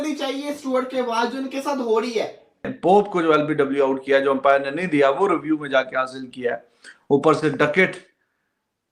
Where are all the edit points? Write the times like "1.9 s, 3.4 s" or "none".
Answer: 2.7 s

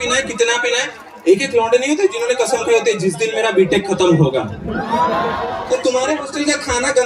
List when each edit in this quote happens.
5.4 s

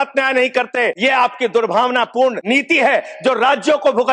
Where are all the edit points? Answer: 1.0 s, 2.4 s

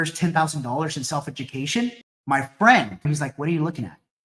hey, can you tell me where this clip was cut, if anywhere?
2.1 s, 3.1 s

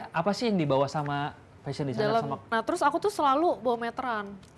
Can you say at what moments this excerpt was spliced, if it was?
2.5 s

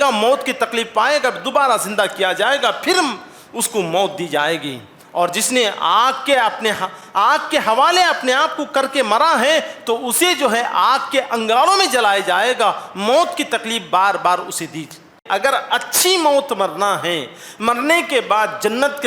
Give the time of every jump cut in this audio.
15.2 s

